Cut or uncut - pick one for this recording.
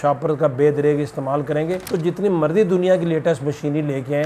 uncut